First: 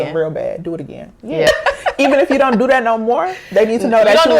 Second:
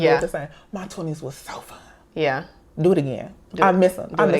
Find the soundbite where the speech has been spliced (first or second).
first